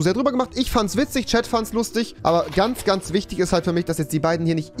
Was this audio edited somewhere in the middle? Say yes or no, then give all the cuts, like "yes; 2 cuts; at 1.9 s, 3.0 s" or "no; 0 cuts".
yes; 1 cut; at 2.2 s